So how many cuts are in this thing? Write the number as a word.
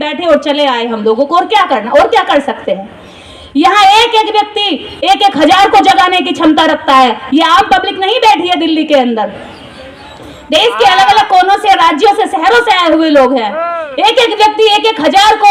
zero